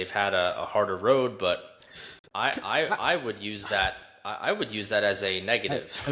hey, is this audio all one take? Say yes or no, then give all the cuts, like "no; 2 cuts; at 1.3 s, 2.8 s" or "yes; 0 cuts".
yes; 0 cuts